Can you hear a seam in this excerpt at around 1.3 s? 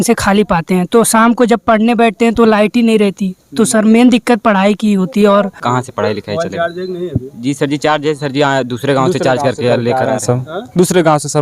no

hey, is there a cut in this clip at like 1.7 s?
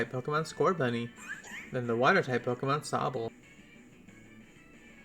no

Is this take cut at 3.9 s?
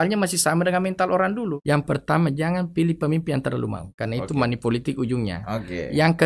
yes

